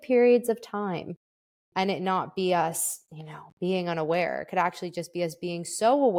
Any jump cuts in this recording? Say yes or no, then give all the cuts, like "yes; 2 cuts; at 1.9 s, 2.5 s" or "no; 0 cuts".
no; 0 cuts